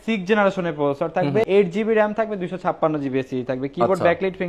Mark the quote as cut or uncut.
cut